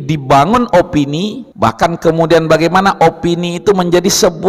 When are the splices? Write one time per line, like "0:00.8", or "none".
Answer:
0:01.4